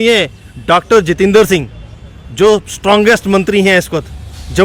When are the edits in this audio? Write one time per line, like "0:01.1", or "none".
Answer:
none

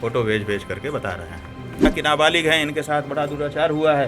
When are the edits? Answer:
0:01.9

